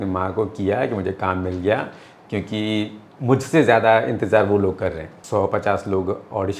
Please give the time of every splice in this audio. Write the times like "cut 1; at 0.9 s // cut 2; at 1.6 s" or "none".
cut 1; at 5.1 s